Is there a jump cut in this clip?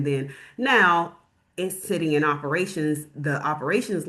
no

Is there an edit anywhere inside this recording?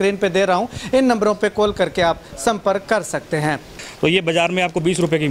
yes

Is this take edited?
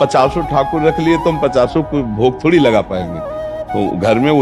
no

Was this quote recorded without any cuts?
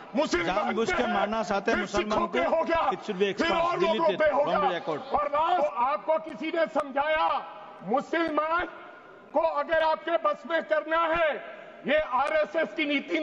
no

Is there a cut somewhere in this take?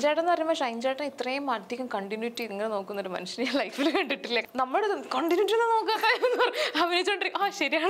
yes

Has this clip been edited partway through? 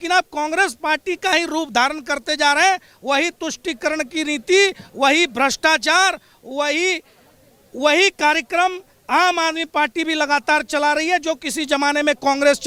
no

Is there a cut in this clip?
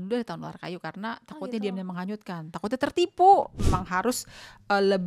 yes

